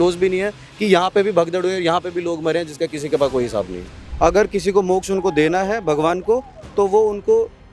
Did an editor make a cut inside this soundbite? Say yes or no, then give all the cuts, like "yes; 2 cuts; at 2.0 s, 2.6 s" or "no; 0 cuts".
yes; 1 cut; at 4.0 s